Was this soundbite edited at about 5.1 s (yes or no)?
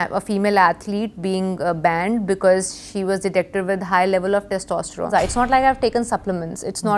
yes